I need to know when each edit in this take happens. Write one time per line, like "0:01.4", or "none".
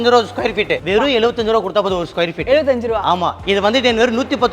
0:00.8
0:03.4